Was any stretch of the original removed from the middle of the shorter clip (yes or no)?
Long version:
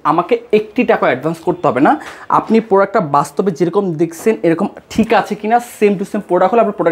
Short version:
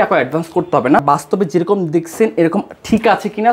yes